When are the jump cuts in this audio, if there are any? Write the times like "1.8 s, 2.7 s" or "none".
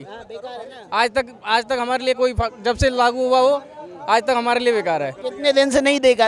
none